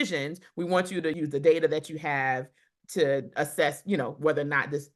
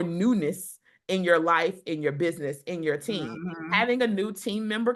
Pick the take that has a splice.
first; 1 cut; at 1.2 s

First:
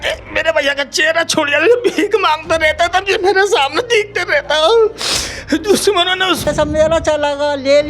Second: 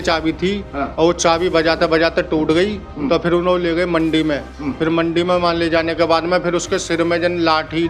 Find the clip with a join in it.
first; 1 cut; at 6.5 s

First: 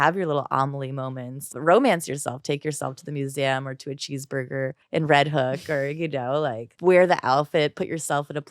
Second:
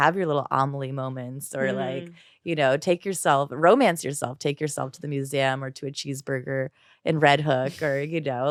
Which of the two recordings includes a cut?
first; 3 cuts; at 1.5 s, 4.8 s, 6.7 s

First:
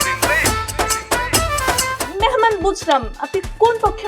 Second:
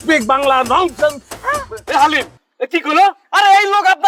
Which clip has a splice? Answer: first; 1 cut; at 2.0 s

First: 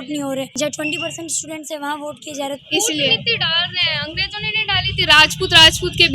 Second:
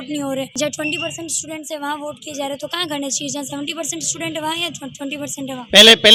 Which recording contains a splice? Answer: first; 1 cut; at 2.6 s

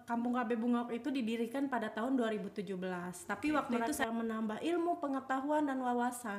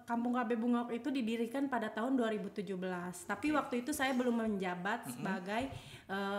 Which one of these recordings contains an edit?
first; 1 cut; at 3.8 s

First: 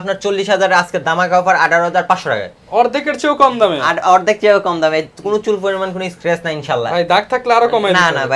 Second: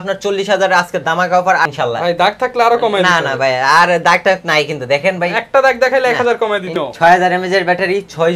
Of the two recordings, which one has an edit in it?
second; 2 cuts; at 1.7 s, 6.7 s

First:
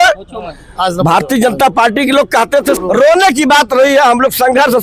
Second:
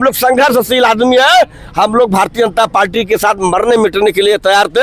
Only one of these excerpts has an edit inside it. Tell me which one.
first; 1 cut; at 2.8 s

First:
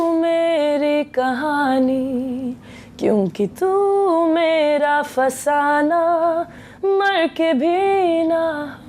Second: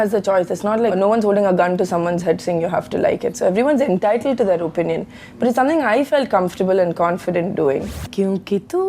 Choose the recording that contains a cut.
second; 2 cuts; at 0.9 s, 8.0 s

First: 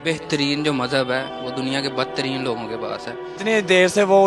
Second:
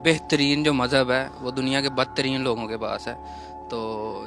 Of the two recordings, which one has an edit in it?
first; 1 cut; at 3.3 s

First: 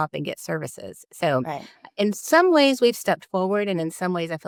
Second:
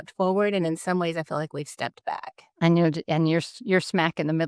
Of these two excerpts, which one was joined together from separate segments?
second; 1 cut; at 2.5 s

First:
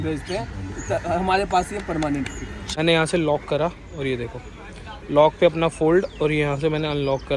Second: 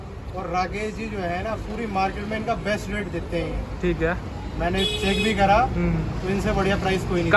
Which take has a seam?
first; 1 cut; at 2.5 s

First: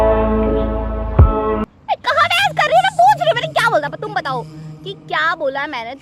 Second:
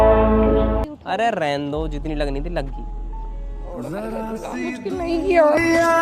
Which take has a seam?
second; 1 cut; at 0.9 s

